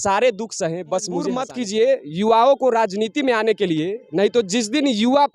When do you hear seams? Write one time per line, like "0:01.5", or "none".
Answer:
0:01.5